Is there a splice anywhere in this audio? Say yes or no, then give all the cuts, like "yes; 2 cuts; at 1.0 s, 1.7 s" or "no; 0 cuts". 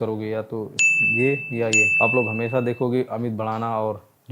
no; 0 cuts